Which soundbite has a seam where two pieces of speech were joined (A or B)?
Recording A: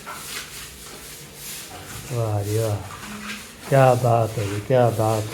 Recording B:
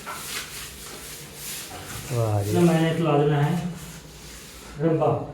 B